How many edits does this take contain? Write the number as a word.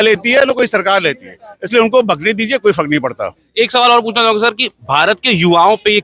zero